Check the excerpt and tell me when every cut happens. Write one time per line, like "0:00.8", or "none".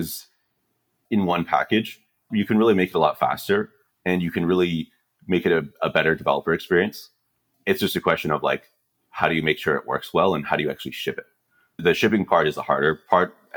0:00.9
0:02.3
0:07.4
0:11.8